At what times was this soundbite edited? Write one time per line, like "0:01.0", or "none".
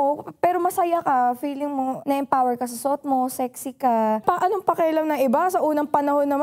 0:02.0
0:04.2